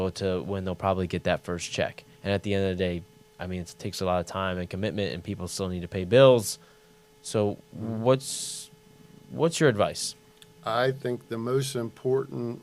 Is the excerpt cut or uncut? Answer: uncut